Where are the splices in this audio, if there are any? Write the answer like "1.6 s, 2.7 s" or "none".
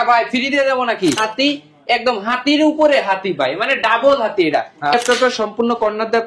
1.2 s, 4.9 s

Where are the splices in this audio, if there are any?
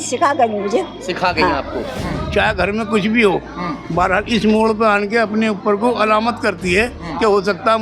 2.0 s

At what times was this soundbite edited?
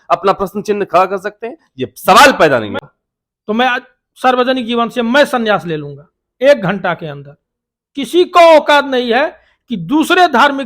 2.8 s

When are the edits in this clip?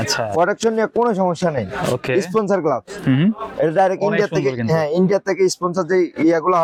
none

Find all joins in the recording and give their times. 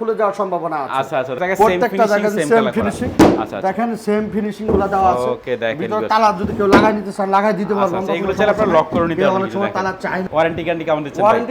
1.3 s, 10.2 s

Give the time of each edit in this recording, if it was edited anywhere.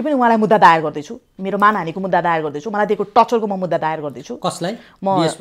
none

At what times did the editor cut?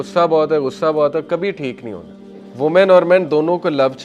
2.4 s

